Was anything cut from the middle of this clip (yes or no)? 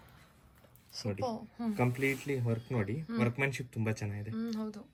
no